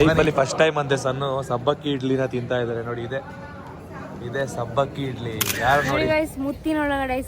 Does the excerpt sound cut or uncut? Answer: cut